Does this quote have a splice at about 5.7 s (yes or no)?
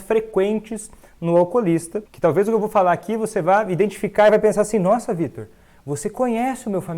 no